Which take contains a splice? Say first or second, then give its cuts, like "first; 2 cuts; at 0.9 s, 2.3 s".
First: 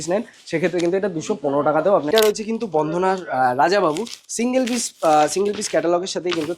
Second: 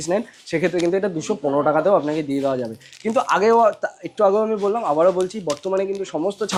first; 1 cut; at 2.1 s